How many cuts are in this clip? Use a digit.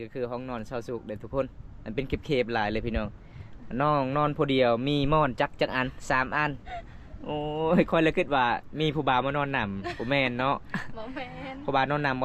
0